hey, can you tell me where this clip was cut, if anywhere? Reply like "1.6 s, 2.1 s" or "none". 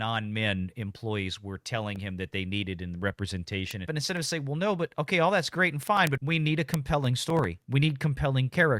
3.9 s, 6.2 s, 7.6 s